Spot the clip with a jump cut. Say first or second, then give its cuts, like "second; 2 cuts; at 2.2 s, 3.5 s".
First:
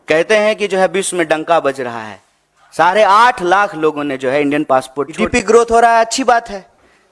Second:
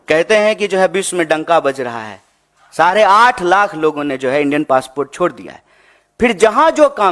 first; 1 cut; at 5.2 s